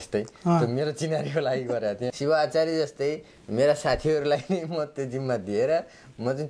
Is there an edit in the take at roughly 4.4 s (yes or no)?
no